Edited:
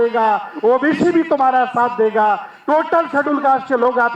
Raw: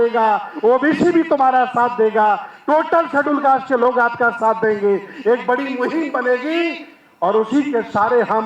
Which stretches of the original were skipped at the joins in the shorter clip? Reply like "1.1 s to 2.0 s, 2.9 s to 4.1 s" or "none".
none

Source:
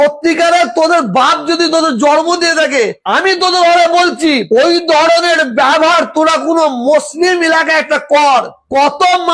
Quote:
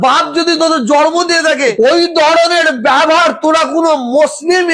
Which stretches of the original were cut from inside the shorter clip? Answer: 2.9 s to 4.5 s

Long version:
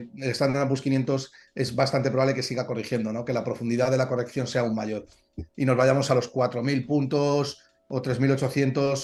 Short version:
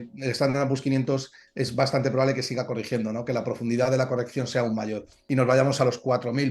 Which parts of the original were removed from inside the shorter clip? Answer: 5.1 s to 5.4 s

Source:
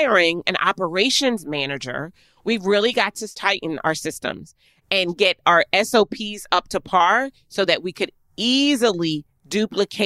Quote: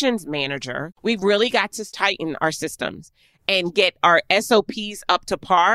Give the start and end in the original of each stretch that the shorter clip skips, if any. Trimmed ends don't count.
2.4 s to 2.6 s

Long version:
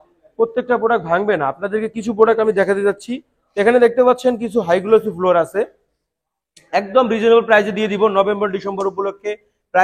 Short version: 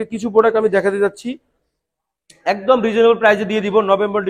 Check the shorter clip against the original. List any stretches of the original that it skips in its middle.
3.4 s to 5.8 s

